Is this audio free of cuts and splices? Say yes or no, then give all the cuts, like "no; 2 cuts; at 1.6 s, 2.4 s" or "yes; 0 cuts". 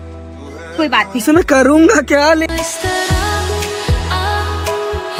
yes; 0 cuts